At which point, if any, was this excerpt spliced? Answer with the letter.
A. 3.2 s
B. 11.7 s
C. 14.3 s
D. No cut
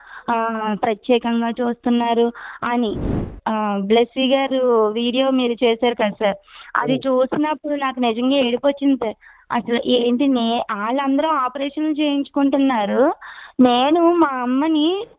A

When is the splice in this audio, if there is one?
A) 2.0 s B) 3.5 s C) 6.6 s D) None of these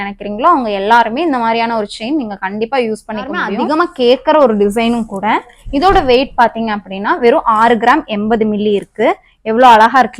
B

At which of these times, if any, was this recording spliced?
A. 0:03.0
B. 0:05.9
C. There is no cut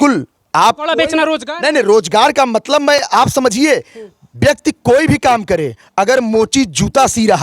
C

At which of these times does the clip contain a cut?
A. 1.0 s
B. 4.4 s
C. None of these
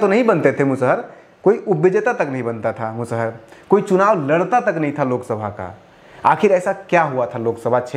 C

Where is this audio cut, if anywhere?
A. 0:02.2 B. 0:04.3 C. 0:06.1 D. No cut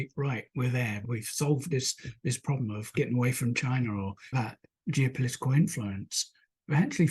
B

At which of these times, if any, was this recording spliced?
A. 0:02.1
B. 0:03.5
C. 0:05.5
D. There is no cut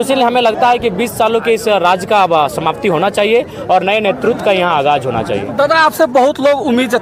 D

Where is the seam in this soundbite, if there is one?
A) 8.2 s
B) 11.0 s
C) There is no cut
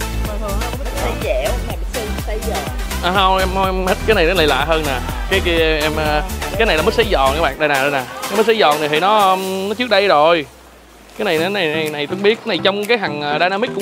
C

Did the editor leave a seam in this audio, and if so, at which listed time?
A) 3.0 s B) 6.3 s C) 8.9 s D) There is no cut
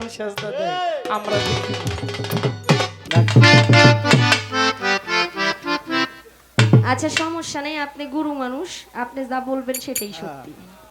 A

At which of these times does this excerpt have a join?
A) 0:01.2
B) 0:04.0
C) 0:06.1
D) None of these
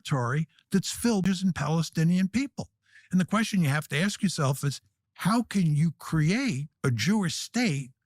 A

